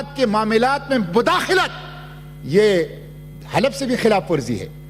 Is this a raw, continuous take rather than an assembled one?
yes; 0 cuts

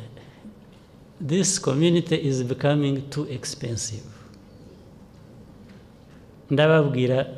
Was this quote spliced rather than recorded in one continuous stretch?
no; 0 cuts

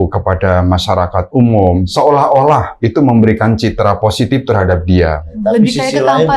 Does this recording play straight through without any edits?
no; 3 cuts; at 1.9 s, 2.8 s, 5.3 s

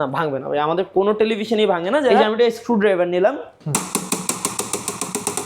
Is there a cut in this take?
yes; 1 cut; at 2.1 s

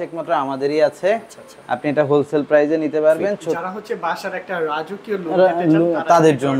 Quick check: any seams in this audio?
yes; 1 cut; at 3.6 s

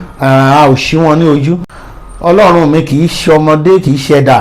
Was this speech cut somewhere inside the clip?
yes; 1 cut; at 1.7 s

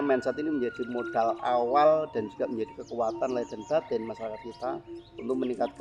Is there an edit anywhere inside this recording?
no; 0 cuts

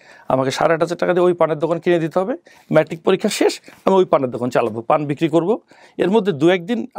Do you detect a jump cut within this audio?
no; 0 cuts

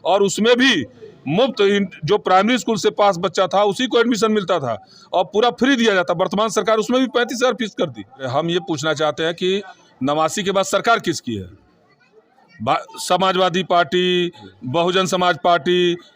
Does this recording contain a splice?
yes; 1 cut; at 8.3 s

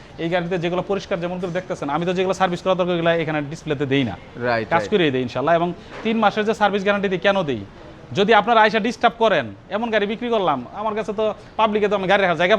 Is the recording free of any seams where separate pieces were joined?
yes; 0 cuts

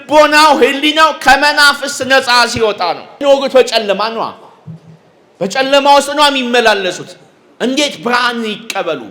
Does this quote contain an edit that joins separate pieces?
yes; 1 cut; at 3.2 s

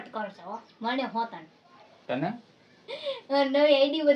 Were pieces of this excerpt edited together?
no; 0 cuts

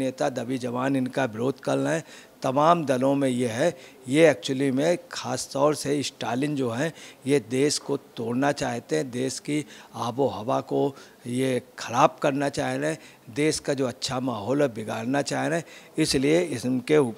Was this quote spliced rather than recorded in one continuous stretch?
no; 0 cuts

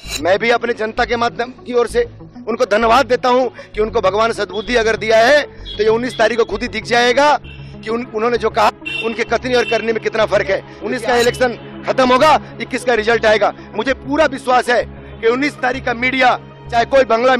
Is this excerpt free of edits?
no; 1 cut; at 10.8 s

